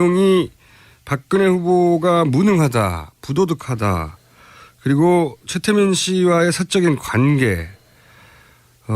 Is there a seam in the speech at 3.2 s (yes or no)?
yes